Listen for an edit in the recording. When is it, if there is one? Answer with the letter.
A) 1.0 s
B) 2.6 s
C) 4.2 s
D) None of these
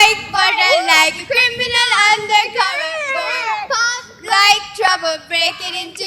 D